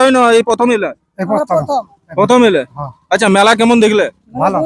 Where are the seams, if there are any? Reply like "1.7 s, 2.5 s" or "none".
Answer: none